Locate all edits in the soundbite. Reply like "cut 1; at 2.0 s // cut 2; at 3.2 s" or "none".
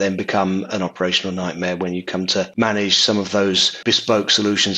cut 1; at 2.5 s // cut 2; at 3.8 s